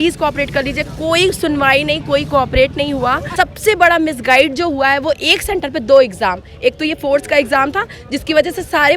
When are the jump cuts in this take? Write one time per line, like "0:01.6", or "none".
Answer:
0:03.2